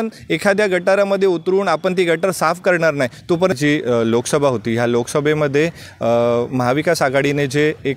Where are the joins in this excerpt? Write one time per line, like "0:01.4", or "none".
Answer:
0:03.6

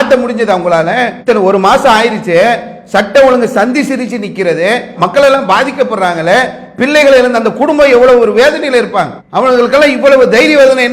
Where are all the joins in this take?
0:01.1

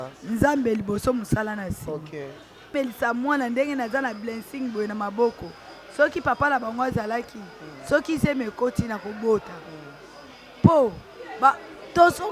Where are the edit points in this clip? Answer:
0:02.7

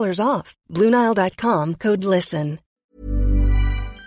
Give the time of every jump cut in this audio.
0:02.7

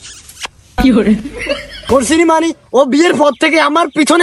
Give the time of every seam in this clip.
0:01.8

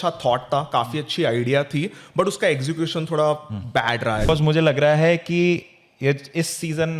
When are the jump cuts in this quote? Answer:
0:04.3

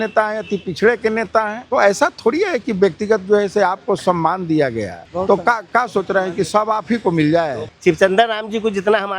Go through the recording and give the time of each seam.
0:01.6
0:05.0
0:07.7

